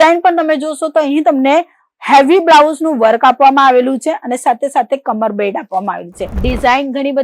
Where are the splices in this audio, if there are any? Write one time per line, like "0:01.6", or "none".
0:06.3